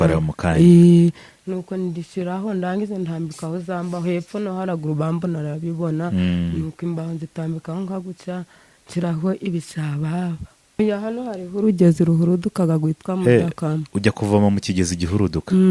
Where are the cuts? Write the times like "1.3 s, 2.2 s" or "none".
10.8 s